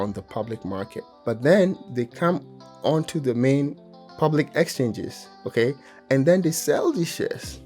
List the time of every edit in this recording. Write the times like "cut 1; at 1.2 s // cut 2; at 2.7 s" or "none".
cut 1; at 1.0 s // cut 2; at 1.8 s // cut 3; at 3.8 s